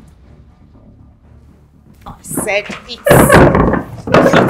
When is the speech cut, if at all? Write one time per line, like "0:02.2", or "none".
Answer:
0:02.0